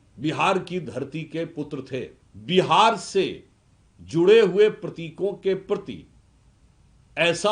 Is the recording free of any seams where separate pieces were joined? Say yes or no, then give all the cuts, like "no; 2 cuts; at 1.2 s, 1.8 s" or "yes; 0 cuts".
no; 1 cut; at 2.3 s